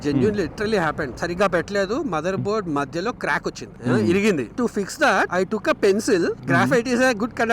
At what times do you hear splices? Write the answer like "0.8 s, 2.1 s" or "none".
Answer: 3.7 s, 4.5 s